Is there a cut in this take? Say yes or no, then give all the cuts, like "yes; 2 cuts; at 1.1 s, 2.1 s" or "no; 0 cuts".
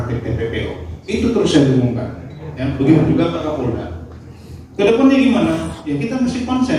no; 0 cuts